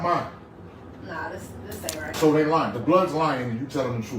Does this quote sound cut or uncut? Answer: cut